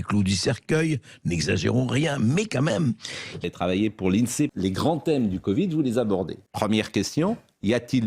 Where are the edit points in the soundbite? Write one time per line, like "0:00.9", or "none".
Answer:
0:03.3
0:04.5
0:06.4